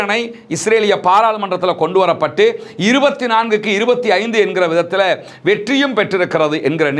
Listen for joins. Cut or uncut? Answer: uncut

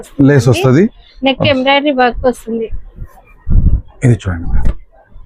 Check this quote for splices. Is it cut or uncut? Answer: uncut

